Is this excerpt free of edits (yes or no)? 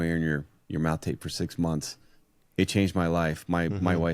yes